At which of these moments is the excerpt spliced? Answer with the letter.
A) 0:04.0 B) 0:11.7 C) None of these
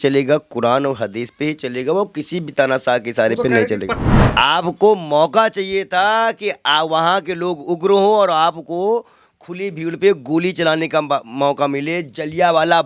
A